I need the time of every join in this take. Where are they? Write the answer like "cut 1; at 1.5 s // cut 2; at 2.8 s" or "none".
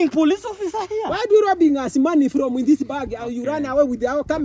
none